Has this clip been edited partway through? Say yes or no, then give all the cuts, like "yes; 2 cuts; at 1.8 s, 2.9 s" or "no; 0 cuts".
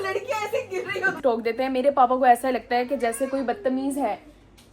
yes; 1 cut; at 1.2 s